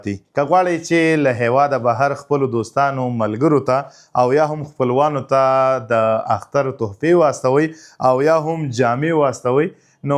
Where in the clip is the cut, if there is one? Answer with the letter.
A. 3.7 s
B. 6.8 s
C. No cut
C